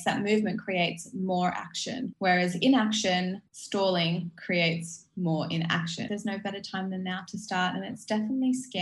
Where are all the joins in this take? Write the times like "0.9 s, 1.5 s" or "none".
2.1 s, 3.5 s, 6.0 s